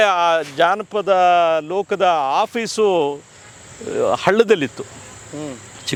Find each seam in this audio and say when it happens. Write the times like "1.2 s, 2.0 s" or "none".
none